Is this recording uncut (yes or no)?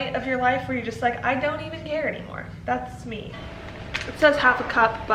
no